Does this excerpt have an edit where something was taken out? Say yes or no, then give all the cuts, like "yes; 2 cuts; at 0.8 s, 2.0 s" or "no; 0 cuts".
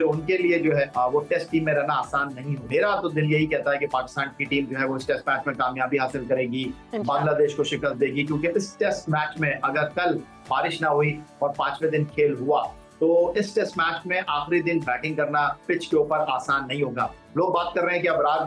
yes; 2 cuts; at 0.9 s, 2.5 s